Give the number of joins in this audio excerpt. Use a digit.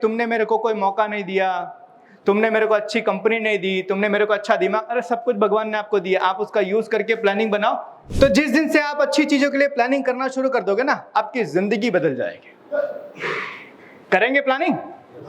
1